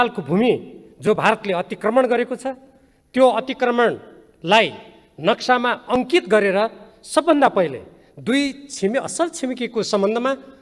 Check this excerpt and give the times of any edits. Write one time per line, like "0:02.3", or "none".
none